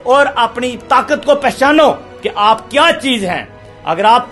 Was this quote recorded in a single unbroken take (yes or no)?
yes